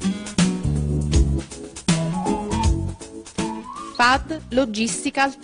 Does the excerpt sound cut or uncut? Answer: cut